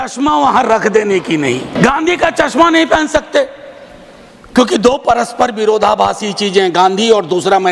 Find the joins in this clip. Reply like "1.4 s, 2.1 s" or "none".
1.7 s